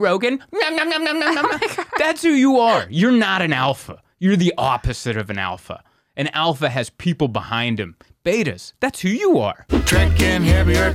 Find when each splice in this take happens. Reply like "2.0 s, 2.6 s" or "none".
9.7 s